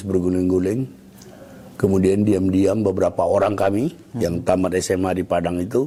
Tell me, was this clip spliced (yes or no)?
no